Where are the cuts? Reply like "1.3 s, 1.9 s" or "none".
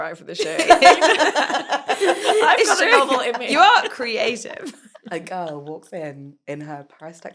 4.9 s